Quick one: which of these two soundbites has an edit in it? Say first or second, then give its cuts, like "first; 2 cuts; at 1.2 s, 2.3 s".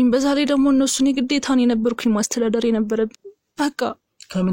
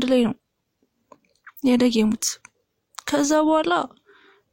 first; 1 cut; at 3.1 s